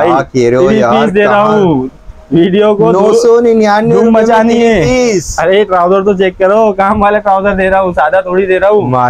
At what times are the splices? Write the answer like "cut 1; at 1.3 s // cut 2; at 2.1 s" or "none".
none